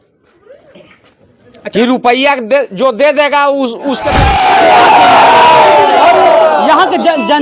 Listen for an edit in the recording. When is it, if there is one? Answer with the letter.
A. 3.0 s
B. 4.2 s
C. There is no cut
B